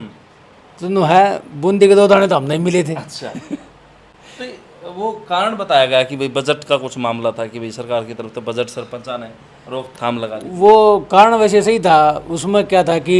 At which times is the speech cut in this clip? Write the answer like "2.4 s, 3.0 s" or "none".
none